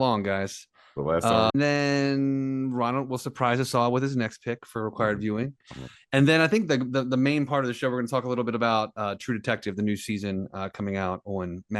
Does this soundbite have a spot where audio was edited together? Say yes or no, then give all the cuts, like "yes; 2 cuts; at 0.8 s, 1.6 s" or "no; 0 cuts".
yes; 1 cut; at 1.5 s